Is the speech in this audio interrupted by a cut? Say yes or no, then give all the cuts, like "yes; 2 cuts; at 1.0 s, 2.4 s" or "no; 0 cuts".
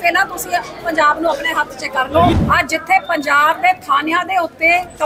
yes; 1 cut; at 2.3 s